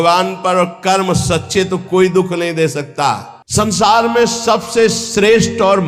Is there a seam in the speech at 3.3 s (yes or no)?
yes